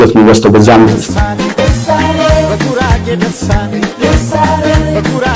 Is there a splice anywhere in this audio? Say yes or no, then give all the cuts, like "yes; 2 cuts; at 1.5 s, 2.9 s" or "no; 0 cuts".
yes; 1 cut; at 1.0 s